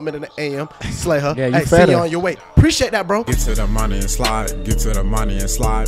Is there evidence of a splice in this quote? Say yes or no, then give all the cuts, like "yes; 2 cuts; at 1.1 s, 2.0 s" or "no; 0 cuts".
yes; 1 cut; at 3.3 s